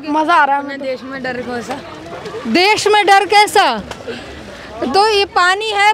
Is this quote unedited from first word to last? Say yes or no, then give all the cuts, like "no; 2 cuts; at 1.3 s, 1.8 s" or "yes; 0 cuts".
yes; 0 cuts